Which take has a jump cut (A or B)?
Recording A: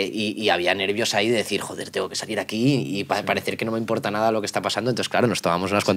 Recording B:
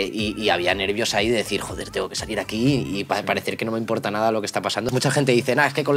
B